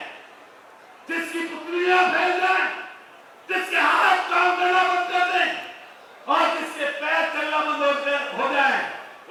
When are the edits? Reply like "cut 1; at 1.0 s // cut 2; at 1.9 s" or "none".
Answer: none